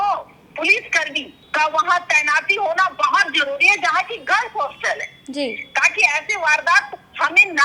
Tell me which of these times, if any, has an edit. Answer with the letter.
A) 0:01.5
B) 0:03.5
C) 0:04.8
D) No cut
D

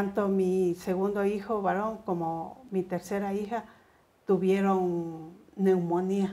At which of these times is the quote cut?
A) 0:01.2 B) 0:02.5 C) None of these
C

